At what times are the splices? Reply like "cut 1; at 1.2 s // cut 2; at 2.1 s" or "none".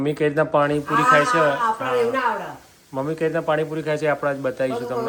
none